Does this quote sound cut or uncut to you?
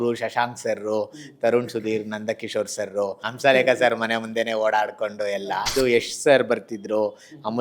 cut